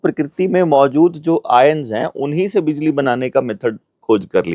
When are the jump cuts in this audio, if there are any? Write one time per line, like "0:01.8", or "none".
none